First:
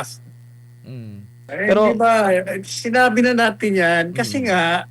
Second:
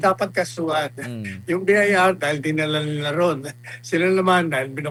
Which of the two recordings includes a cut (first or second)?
first